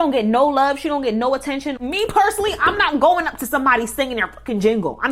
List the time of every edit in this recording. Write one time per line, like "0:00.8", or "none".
0:01.8